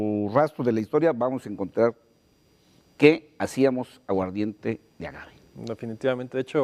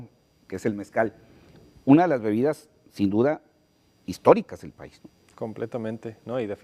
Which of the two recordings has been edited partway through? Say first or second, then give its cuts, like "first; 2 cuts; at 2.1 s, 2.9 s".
second; 1 cut; at 2.0 s